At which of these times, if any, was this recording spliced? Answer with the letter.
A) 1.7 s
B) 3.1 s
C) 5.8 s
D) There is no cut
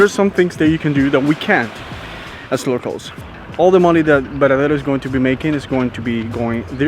B